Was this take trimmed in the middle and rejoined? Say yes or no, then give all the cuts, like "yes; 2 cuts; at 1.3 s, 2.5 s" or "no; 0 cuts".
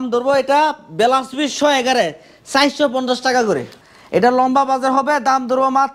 yes; 1 cut; at 3.7 s